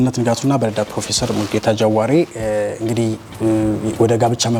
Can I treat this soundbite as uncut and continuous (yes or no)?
yes